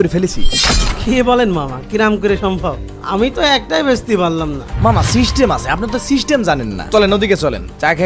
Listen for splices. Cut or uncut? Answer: uncut